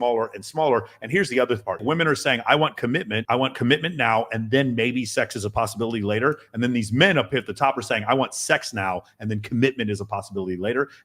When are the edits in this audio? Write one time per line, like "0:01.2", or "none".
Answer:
0:01.8
0:03.2